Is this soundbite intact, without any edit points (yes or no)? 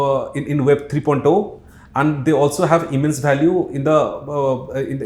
yes